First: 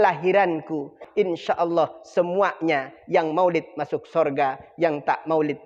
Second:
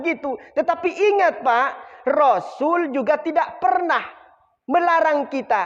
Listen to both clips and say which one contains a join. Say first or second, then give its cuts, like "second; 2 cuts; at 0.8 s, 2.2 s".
first; 1 cut; at 1.0 s